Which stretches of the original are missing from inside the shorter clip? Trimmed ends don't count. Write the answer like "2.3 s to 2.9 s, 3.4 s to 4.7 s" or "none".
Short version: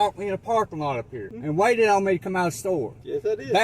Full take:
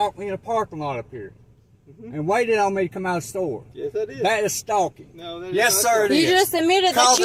1.2 s to 1.9 s